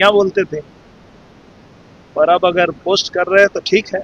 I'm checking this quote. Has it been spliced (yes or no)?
no